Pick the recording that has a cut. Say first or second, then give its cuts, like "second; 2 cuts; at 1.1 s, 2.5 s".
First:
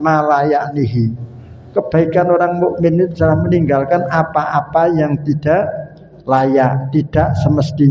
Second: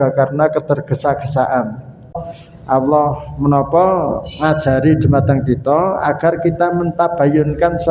second; 1 cut; at 2.3 s